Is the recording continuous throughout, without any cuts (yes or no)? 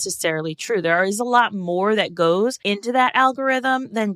no